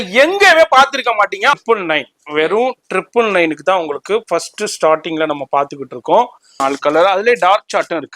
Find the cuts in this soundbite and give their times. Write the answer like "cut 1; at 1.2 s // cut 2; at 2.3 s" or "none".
cut 1; at 1.5 s // cut 2; at 6.5 s